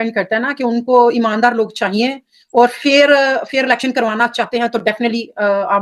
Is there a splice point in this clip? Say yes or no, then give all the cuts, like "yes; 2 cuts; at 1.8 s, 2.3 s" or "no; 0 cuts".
no; 0 cuts